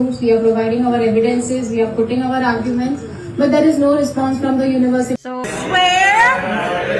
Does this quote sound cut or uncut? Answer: cut